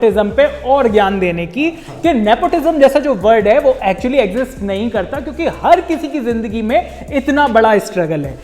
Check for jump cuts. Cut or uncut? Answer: uncut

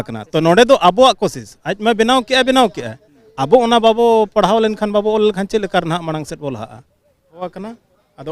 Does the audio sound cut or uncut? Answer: cut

